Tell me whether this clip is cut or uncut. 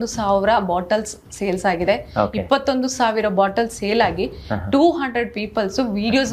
uncut